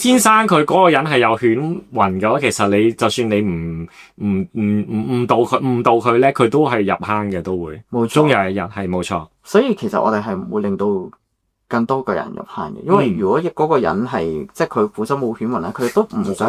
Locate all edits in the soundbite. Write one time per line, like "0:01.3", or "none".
none